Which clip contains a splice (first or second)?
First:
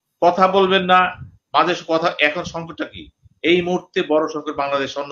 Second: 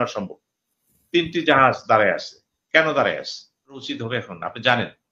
second